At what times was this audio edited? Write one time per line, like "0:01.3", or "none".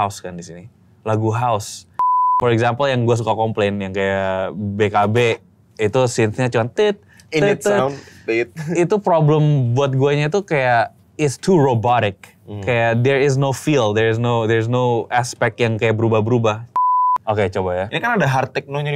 0:02.0
0:16.7